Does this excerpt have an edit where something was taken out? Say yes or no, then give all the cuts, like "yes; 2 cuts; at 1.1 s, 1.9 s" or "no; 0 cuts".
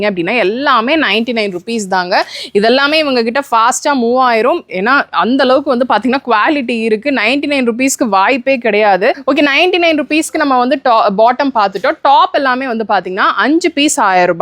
yes; 1 cut; at 9.2 s